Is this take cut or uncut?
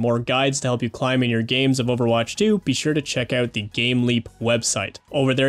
uncut